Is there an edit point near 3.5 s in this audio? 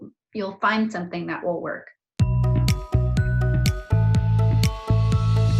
no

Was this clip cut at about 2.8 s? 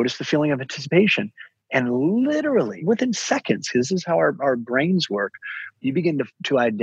yes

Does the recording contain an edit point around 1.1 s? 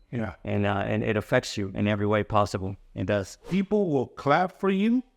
no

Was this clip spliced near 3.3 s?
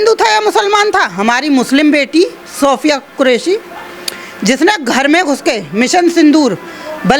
no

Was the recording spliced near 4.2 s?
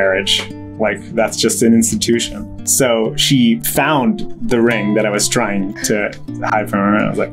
no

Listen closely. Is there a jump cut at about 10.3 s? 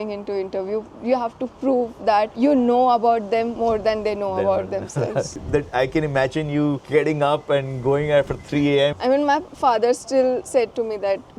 no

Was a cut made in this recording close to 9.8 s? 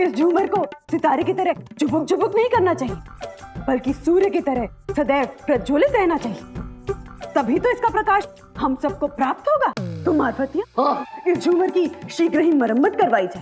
yes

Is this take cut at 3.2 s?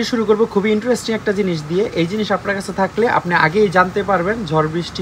no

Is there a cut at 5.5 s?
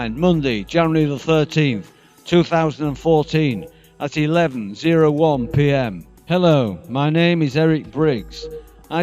yes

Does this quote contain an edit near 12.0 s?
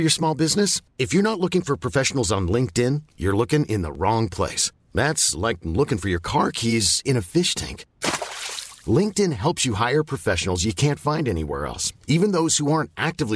no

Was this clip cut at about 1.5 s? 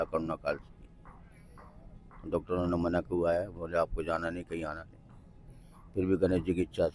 no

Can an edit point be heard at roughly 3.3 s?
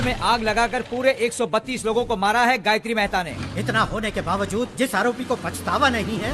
yes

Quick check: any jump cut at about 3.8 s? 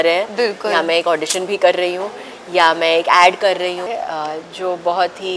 yes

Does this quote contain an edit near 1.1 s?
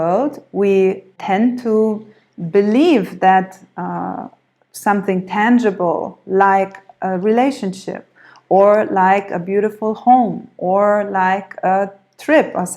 yes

